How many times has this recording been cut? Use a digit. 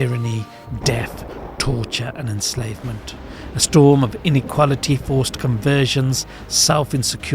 1